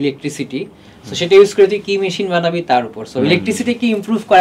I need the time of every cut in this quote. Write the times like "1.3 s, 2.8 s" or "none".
none